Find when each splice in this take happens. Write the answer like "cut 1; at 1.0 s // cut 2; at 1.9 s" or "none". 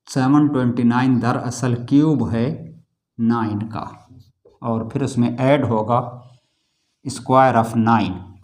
cut 1; at 4.1 s